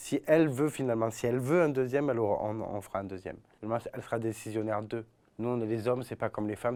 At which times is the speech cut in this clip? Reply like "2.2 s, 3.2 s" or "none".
none